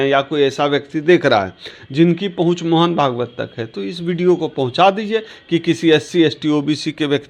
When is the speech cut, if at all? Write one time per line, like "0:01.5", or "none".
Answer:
none